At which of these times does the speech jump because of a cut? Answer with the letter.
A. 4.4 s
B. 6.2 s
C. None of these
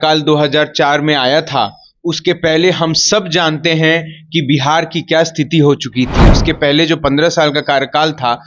B